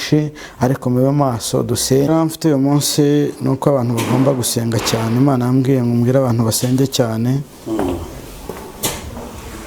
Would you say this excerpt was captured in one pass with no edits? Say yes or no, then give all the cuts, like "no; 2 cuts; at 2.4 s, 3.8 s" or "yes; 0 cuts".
no; 1 cut; at 2.1 s